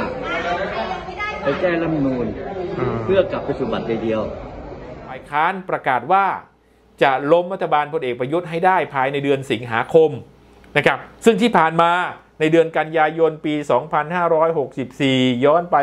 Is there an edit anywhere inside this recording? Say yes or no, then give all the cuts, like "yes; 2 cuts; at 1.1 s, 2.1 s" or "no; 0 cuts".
yes; 1 cut; at 5.3 s